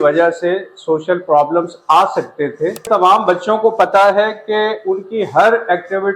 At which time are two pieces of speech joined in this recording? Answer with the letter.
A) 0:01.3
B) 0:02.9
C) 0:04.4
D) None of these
B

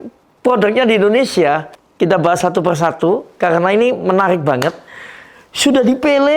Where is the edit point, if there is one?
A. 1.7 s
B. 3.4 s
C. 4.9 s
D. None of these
A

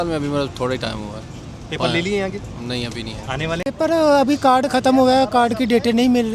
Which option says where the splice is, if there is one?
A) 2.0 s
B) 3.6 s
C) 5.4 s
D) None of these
B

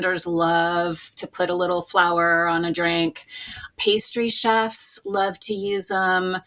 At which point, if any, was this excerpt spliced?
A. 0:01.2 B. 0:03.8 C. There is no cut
C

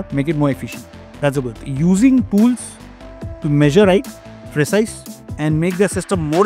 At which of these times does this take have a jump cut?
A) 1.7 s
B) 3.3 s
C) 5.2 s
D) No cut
A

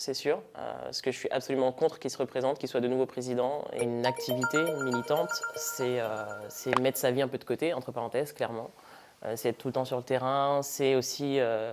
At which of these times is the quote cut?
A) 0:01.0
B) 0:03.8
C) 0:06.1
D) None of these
B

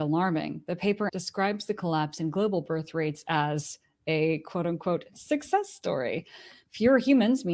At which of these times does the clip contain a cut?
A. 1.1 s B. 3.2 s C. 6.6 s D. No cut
A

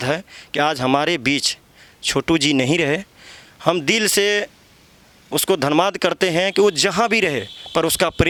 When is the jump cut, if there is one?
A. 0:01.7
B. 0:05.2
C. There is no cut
C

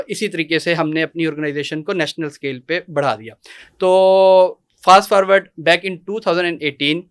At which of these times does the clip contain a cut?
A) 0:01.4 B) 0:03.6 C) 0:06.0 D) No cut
D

